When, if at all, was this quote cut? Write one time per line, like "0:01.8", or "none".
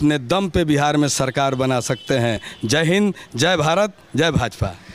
none